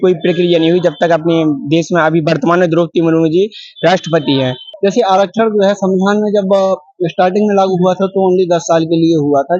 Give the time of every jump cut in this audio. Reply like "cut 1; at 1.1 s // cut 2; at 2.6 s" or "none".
cut 1; at 4.6 s